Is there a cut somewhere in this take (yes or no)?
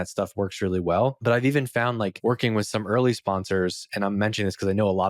yes